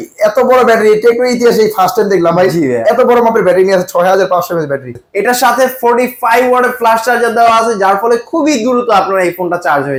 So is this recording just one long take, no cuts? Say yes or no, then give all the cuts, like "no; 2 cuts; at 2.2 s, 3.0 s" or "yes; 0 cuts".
yes; 0 cuts